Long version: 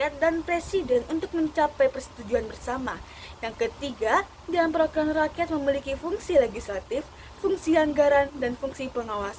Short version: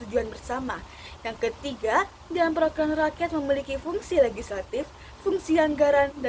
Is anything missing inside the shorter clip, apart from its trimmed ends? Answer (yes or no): no